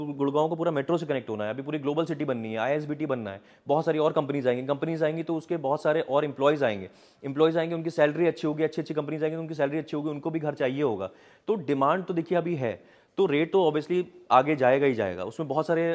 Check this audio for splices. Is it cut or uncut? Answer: uncut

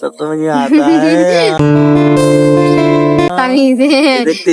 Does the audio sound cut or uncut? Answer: uncut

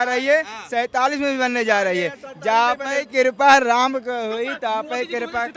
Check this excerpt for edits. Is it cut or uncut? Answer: uncut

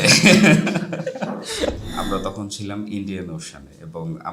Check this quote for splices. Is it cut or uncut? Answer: cut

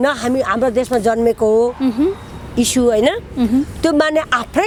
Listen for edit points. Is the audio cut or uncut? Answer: uncut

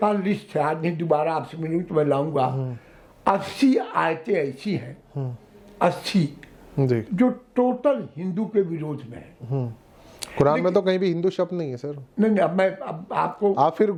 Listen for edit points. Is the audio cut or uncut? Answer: uncut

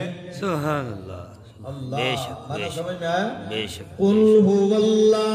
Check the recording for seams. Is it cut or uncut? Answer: uncut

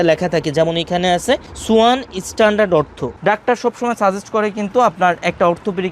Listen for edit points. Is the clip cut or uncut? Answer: cut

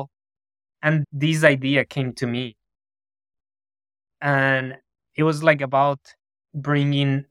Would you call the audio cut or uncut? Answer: cut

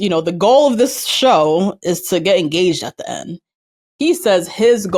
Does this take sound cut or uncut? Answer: uncut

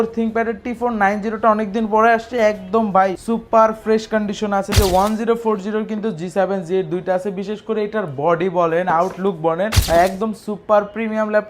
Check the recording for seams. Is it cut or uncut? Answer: cut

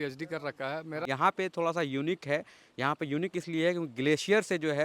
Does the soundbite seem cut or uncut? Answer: cut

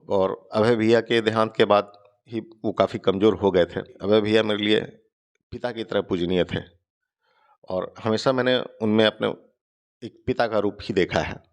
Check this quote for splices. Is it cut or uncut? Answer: cut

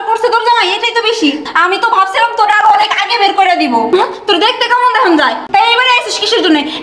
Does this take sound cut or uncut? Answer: cut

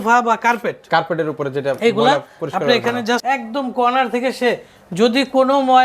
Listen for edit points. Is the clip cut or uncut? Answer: cut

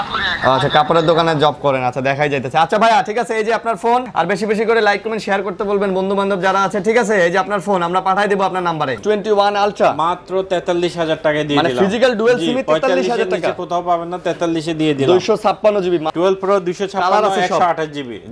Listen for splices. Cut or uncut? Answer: cut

